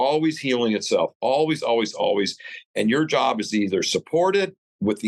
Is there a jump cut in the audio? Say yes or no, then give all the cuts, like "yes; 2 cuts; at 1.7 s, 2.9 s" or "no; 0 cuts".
no; 0 cuts